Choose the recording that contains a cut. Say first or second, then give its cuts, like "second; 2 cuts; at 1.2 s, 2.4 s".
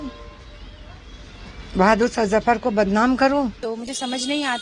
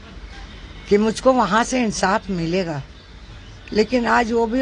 first; 1 cut; at 3.6 s